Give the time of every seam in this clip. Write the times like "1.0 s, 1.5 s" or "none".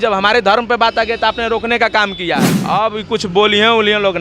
2.6 s